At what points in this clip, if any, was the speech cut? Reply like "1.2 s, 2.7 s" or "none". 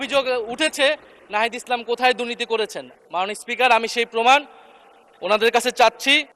none